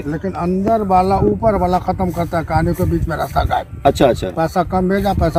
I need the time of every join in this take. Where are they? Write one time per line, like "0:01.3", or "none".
none